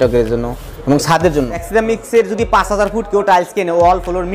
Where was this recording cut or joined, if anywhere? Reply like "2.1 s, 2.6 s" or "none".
1.7 s